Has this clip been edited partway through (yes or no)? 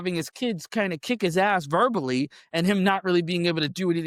no